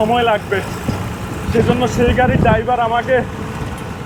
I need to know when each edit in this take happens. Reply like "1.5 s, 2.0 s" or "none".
none